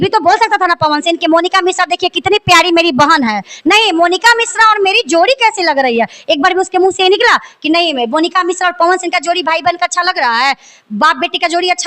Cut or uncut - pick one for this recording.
uncut